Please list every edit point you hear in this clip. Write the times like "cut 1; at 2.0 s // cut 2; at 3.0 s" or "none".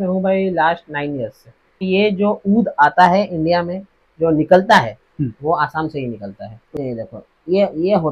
cut 1; at 1.8 s // cut 2; at 6.6 s